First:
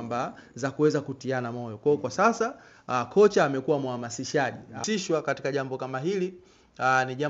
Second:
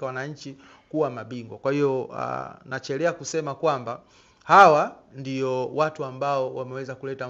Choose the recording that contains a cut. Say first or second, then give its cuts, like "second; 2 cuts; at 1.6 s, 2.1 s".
first; 1 cut; at 4.8 s